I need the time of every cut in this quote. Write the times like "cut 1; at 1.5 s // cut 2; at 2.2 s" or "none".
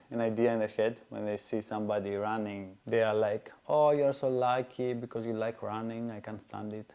cut 1; at 2.7 s